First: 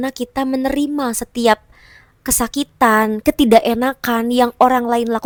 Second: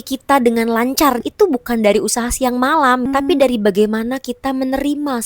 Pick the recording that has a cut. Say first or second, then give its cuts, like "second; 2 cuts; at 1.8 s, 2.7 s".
second; 2 cuts; at 1.2 s, 3.1 s